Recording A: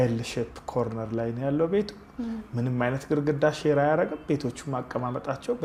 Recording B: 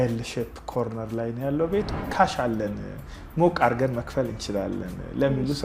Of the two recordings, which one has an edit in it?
B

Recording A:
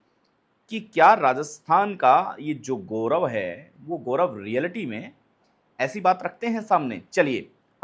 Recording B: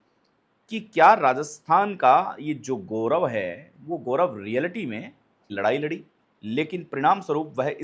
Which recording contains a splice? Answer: B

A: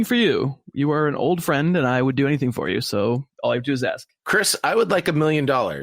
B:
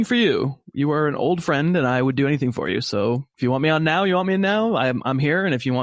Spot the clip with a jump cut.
A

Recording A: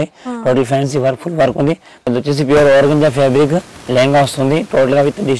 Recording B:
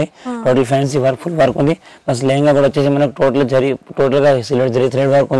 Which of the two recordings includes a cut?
A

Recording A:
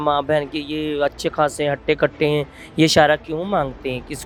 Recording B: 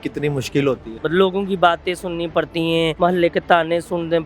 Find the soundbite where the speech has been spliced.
B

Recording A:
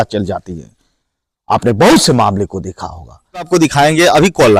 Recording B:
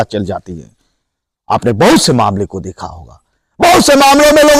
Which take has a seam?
A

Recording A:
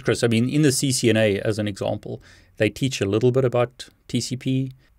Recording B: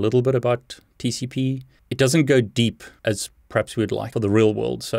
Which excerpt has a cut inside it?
B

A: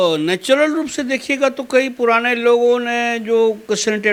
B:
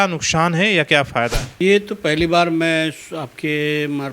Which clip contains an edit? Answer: B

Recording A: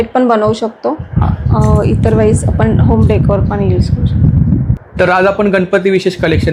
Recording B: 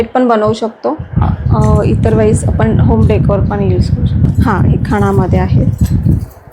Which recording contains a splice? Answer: B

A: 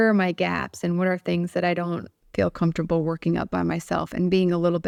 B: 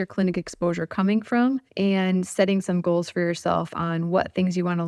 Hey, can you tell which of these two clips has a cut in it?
B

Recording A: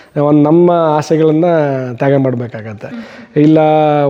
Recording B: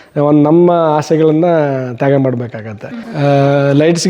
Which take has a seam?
B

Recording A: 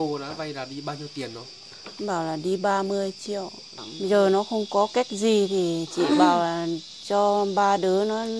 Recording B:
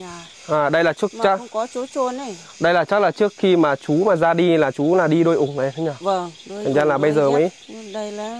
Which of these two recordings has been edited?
A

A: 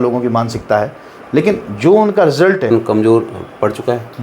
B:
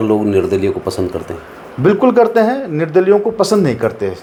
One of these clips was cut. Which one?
A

